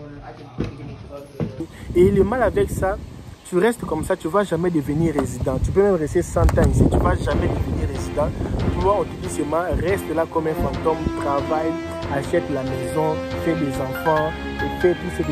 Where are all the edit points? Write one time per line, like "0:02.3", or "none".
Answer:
0:01.7